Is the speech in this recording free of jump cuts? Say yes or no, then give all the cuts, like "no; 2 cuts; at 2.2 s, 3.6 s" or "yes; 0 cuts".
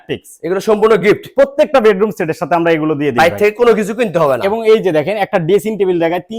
yes; 0 cuts